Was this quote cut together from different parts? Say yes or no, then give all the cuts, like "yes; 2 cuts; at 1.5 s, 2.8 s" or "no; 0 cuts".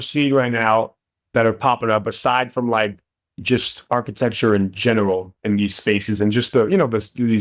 no; 0 cuts